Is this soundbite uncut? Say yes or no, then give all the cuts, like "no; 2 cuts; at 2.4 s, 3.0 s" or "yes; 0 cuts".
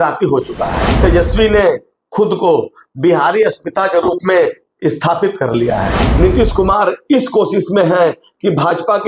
no; 2 cuts; at 1.0 s, 6.0 s